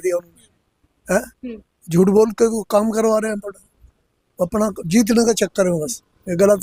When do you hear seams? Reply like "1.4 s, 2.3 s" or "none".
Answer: none